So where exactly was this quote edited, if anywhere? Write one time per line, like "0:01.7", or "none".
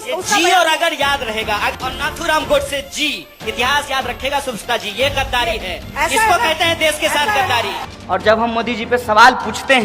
0:01.7
0:07.9